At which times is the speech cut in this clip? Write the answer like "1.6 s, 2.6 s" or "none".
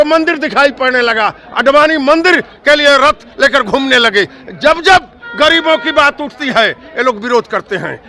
none